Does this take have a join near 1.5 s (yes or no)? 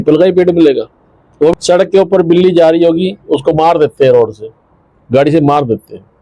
yes